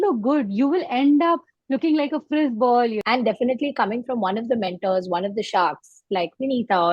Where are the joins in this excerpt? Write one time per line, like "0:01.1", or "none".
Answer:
0:03.0